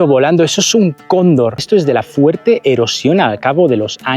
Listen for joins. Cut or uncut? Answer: cut